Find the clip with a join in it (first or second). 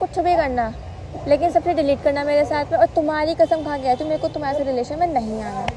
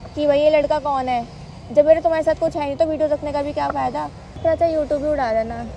second